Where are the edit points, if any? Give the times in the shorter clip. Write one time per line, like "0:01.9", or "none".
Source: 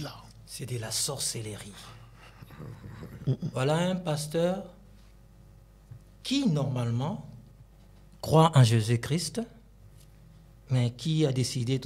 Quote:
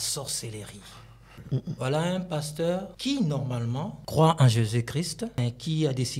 0:01.4
0:02.9
0:04.0
0:05.3